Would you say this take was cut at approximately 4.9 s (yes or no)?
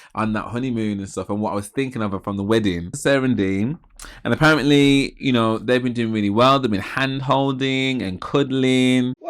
no